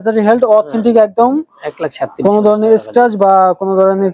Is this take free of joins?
yes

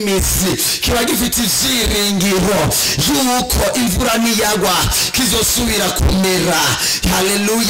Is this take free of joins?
yes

